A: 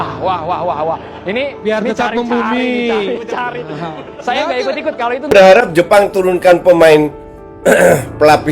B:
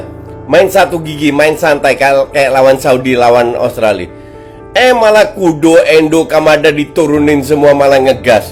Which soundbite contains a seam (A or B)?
A